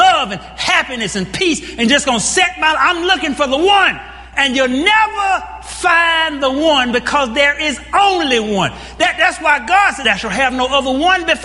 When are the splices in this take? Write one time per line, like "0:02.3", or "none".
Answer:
0:10.0